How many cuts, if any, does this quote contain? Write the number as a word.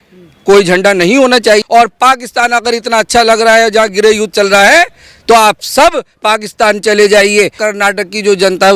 two